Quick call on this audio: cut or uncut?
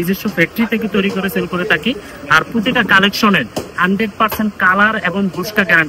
uncut